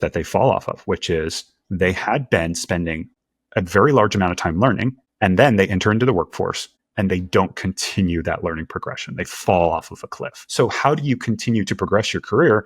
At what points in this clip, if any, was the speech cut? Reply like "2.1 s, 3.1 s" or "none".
10.4 s